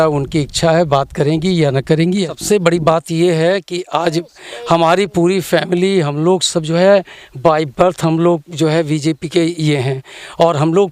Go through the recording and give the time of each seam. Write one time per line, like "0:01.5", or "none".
0:02.3